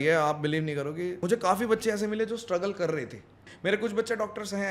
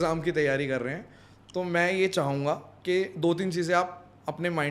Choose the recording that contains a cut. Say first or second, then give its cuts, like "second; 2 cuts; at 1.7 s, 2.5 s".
first; 2 cuts; at 1.2 s, 3.5 s